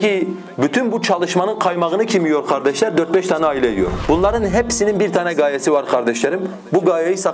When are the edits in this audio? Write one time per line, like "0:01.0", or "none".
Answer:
0:03.9